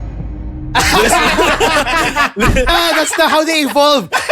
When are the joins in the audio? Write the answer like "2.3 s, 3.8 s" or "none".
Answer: 2.7 s